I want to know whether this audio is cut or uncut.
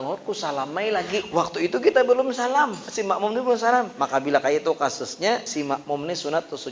cut